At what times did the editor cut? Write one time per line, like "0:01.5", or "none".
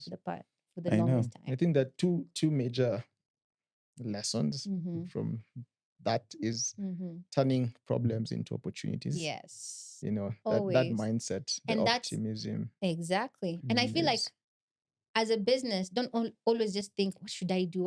none